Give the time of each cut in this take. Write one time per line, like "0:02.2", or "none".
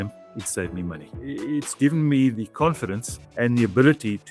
none